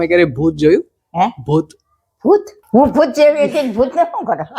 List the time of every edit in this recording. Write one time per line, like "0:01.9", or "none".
0:02.6